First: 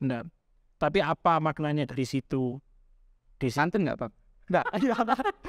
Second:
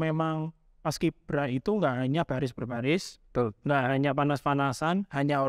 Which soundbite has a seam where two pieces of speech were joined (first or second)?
first